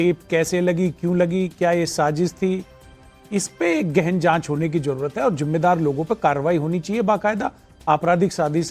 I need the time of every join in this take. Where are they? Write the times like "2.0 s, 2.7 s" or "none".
4.3 s